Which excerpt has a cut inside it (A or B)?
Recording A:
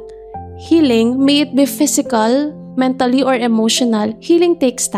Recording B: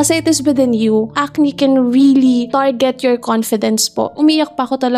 B